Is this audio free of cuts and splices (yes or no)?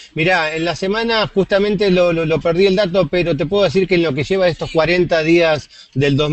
no